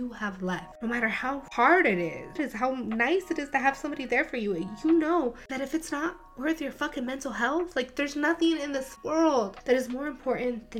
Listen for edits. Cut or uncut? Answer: cut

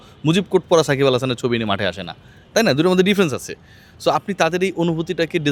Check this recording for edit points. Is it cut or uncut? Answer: uncut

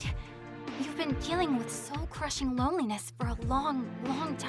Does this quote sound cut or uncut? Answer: uncut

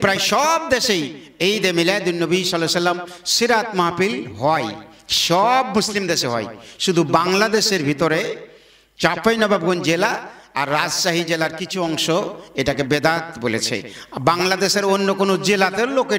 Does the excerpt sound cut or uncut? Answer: uncut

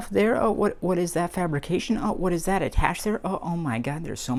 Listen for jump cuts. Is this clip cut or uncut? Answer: uncut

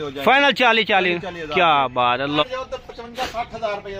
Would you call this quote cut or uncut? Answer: cut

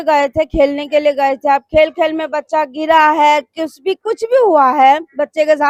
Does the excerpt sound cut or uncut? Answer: uncut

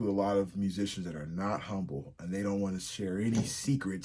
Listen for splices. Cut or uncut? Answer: uncut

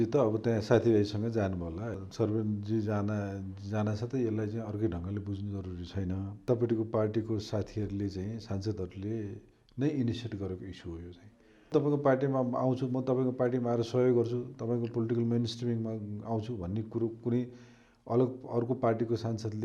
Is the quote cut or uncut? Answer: cut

